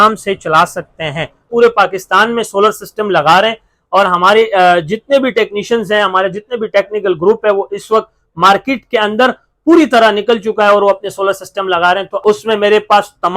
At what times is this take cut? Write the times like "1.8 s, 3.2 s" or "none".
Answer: 1.5 s, 12.2 s